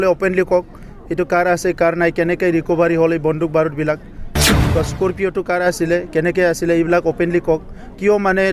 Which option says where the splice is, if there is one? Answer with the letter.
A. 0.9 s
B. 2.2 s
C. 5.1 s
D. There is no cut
D